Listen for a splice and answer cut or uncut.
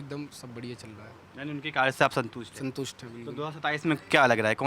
uncut